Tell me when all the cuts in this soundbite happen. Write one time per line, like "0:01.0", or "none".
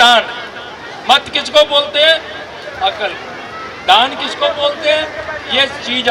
none